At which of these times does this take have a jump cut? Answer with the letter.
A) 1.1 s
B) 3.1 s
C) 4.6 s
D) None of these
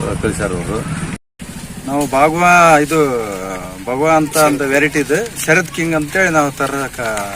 A